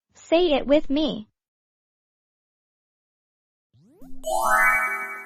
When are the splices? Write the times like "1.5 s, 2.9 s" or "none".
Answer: none